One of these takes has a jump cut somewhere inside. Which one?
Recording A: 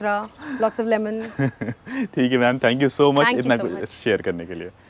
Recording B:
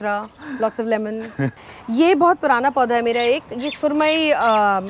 B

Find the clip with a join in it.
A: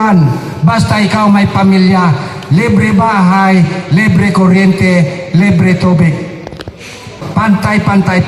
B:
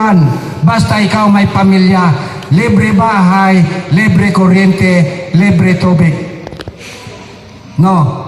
A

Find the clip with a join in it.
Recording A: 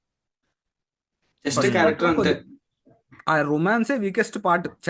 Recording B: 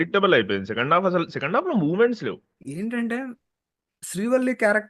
B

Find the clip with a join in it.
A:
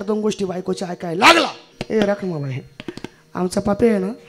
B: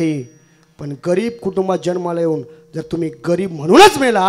A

